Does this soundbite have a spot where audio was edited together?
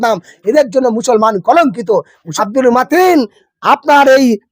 yes; 1 cut; at 2.3 s

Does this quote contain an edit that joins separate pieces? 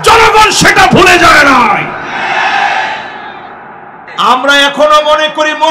yes; 1 cut; at 4.0 s

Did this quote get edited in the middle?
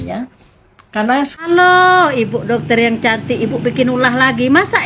no; 0 cuts

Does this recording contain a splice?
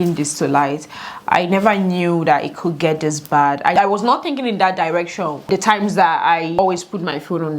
yes; 3 cuts; at 3.7 s, 5.5 s, 6.6 s

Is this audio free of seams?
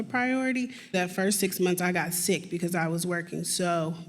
no; 1 cut; at 0.9 s

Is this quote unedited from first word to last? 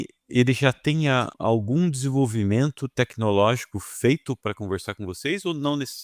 no; 1 cut; at 1.3 s

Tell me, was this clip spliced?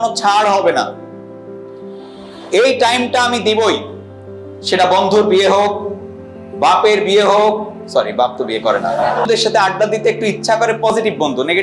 yes; 1 cut; at 9.3 s

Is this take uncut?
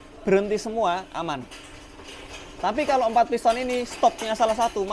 yes; 0 cuts

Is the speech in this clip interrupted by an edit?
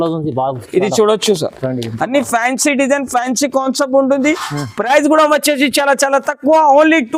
no; 0 cuts

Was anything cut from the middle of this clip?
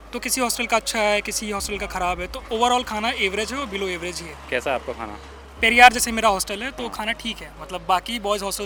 no; 0 cuts

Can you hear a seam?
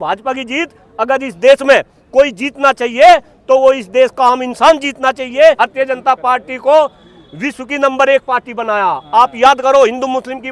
yes; 1 cut; at 5.6 s

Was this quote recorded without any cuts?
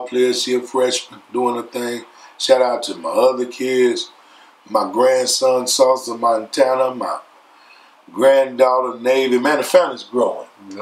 yes; 0 cuts

